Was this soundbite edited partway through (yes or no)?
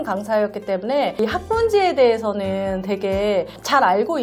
no